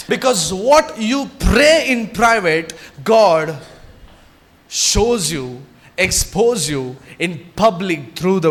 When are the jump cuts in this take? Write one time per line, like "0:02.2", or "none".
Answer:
none